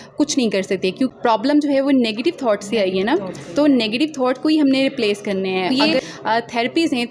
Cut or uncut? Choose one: cut